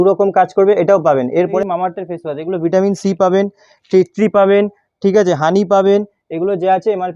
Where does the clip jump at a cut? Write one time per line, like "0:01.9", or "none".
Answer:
0:01.5